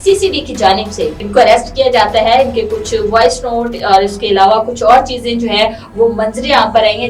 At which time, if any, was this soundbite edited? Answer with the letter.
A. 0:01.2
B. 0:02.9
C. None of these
A